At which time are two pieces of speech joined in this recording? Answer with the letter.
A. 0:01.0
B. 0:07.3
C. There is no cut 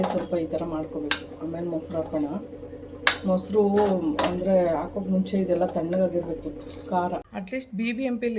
B